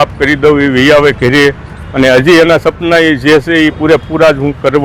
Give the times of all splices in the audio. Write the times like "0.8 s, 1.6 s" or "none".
none